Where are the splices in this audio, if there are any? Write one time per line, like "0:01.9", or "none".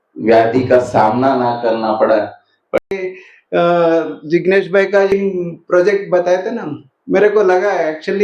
0:02.8
0:05.1